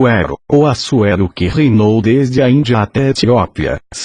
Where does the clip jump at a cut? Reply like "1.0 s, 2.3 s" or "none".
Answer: none